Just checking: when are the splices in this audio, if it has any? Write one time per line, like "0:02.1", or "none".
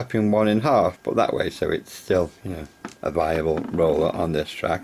none